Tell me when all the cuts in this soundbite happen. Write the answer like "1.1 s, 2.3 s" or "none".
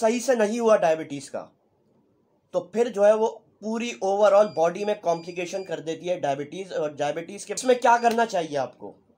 7.6 s